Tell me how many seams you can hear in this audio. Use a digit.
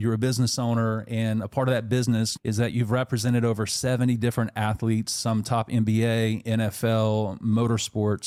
0